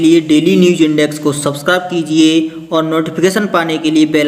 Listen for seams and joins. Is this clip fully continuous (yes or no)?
yes